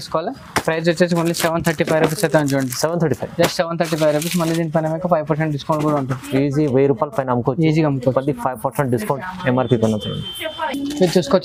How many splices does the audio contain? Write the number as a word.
zero